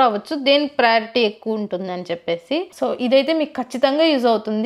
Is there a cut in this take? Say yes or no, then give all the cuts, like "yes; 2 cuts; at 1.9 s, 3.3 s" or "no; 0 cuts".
yes; 1 cut; at 2.7 s